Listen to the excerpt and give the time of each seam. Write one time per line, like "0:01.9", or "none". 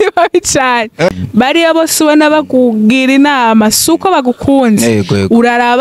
0:01.1